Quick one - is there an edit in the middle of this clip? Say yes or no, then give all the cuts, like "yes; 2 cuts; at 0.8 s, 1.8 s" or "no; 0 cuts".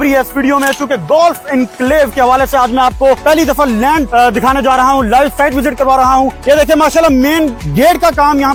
no; 0 cuts